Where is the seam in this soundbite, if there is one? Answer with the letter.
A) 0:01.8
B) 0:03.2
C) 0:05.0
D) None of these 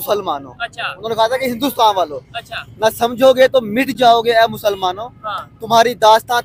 D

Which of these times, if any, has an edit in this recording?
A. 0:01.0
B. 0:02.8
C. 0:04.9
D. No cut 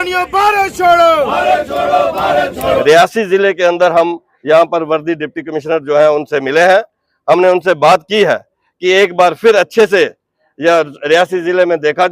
B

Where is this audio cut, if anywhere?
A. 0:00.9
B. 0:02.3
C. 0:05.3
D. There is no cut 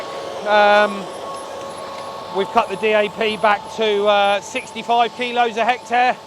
D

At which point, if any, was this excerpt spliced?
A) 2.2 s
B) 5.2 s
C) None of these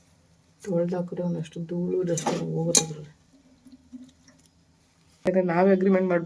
B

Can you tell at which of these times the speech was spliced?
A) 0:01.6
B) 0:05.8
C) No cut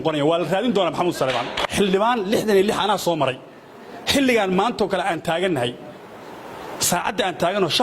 A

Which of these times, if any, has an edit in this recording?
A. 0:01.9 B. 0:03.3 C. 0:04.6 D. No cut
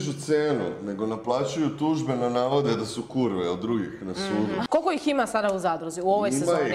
C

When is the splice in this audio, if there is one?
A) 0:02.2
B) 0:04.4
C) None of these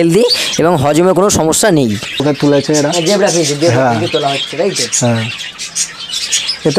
A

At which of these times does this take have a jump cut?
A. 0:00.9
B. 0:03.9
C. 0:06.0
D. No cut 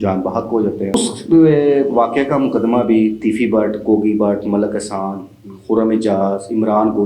A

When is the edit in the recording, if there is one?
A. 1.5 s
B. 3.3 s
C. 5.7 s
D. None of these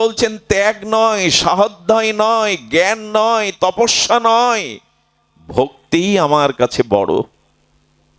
D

